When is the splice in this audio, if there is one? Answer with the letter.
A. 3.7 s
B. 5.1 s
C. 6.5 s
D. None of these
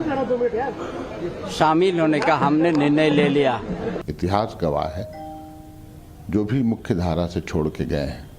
C